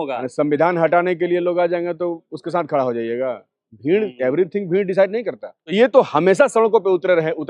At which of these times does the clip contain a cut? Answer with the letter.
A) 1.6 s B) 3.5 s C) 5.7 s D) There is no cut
C